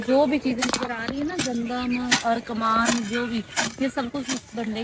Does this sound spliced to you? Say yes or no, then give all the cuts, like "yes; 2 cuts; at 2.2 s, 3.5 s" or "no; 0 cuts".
no; 0 cuts